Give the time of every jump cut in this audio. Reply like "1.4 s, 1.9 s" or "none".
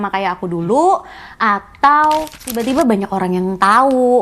2.6 s